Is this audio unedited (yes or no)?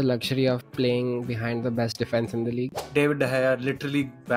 no